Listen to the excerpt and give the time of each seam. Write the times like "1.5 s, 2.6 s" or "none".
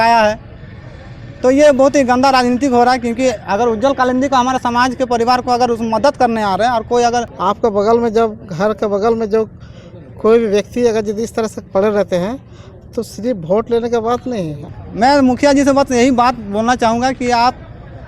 7.3 s, 14.6 s